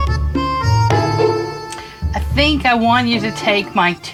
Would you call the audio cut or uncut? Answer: uncut